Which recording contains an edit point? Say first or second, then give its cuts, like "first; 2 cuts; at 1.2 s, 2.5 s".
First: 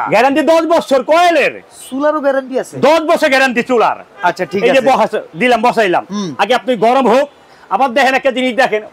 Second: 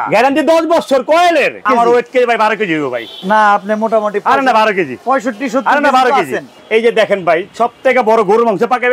second; 3 cuts; at 1.6 s, 3.1 s, 6.6 s